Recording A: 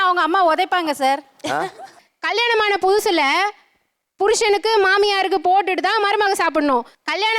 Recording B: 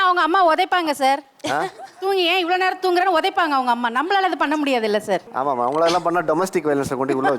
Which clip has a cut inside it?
A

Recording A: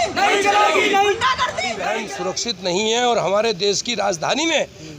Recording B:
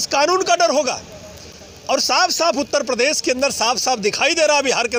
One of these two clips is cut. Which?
A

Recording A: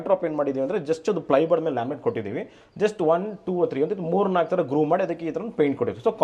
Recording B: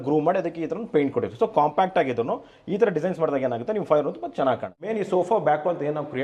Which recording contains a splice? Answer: B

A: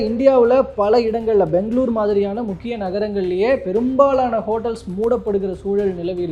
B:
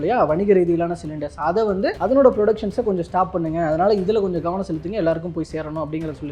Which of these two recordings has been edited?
B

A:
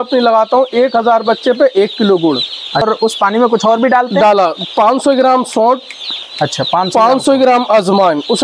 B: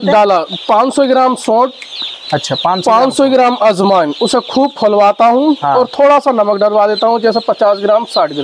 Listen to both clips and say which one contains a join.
A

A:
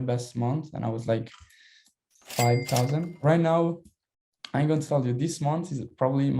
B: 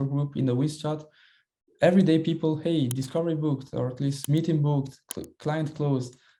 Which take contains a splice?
A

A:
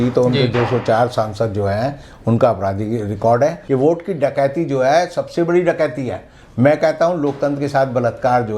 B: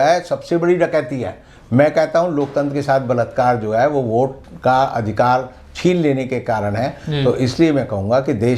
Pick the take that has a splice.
A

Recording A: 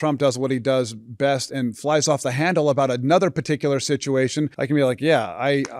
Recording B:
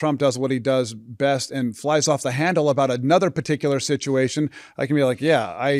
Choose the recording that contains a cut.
A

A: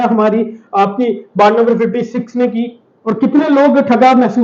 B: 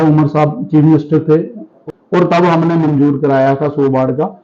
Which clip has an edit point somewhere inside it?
B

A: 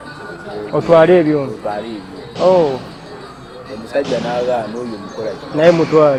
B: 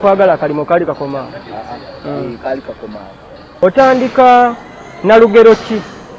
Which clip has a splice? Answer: B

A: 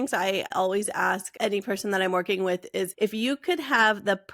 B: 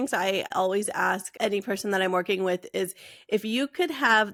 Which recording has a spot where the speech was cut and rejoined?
A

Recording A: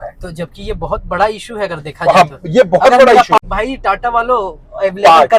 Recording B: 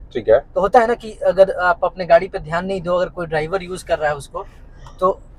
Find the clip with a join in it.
A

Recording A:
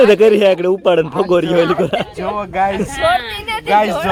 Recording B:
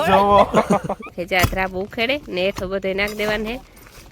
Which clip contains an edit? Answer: B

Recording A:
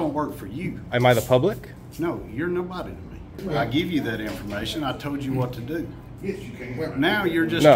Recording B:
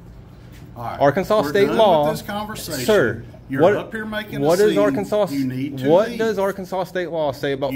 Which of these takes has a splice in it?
A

